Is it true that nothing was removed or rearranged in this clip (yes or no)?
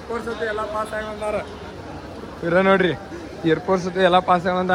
yes